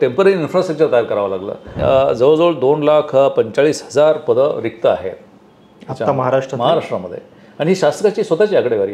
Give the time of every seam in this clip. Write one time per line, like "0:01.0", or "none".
0:01.6